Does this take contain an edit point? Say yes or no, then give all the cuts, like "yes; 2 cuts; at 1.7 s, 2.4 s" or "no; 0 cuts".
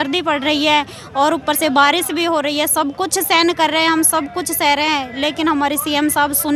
no; 0 cuts